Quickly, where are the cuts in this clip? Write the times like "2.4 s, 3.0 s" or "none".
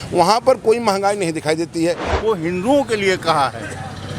2.1 s